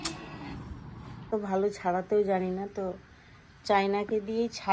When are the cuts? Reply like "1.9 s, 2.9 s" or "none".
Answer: 1.3 s